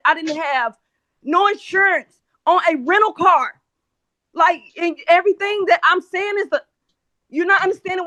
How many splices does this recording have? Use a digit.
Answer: 0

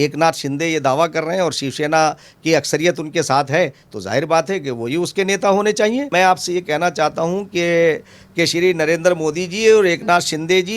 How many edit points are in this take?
1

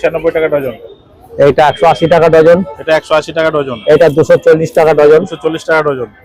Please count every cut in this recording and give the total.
0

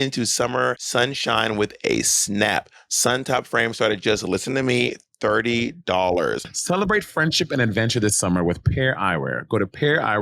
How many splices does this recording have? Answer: 1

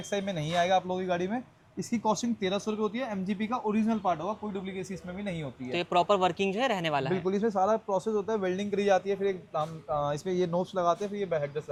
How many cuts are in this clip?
0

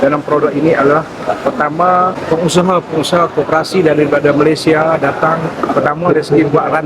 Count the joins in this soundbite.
1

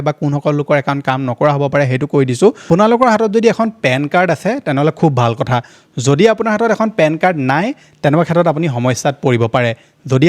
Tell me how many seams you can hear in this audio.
1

